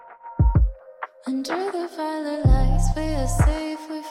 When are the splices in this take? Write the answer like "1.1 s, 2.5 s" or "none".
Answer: 1.1 s